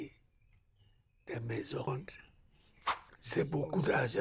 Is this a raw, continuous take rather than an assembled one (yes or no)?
no